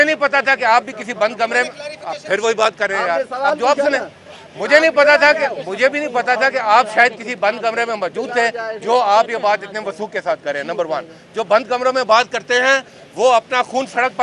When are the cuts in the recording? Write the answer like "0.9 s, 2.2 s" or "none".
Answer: none